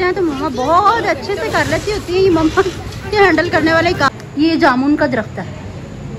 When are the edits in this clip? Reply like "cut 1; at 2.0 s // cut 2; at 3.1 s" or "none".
cut 1; at 4.1 s